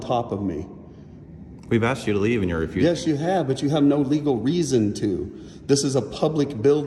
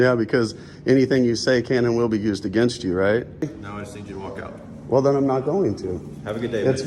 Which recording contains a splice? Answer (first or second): second